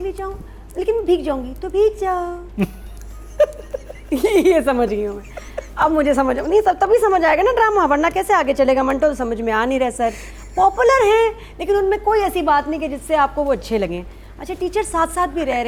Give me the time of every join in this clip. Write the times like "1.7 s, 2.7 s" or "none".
none